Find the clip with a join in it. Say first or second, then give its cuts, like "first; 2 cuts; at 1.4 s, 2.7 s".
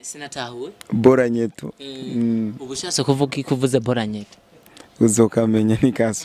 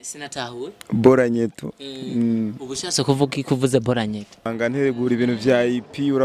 second; 1 cut; at 4.5 s